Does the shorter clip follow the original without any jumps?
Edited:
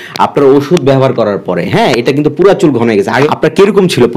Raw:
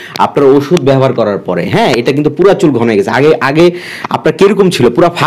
no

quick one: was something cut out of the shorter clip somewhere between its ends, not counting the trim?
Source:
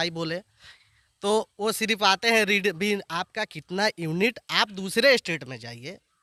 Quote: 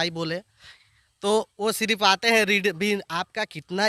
no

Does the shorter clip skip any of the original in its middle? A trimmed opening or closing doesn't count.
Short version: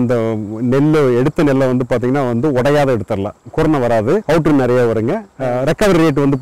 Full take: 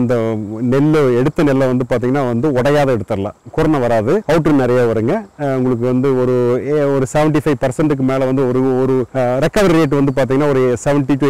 yes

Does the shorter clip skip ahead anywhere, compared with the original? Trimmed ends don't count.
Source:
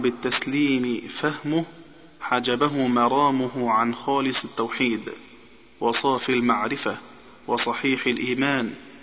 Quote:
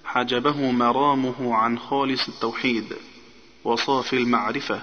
no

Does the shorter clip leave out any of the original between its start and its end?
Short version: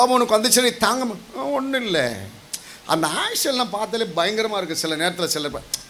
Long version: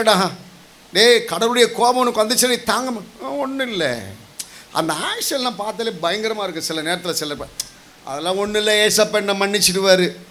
no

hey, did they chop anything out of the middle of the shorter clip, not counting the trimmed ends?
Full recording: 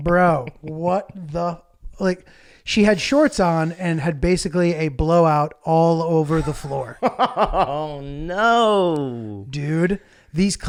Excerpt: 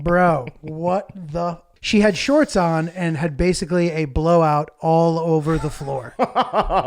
yes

